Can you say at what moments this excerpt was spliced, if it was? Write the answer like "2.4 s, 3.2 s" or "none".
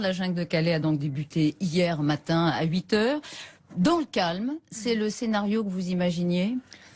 3.1 s